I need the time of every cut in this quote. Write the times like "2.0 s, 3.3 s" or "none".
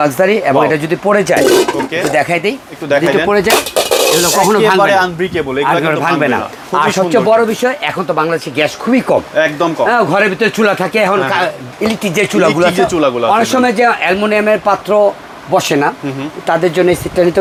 none